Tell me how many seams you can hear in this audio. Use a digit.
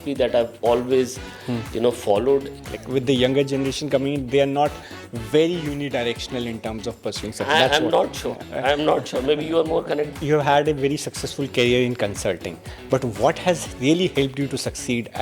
2